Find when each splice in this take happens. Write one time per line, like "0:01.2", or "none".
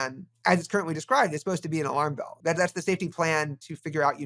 0:02.4